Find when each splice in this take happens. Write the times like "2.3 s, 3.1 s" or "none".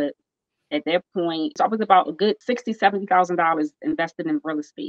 1.5 s, 2.4 s